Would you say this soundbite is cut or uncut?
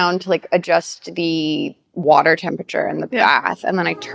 uncut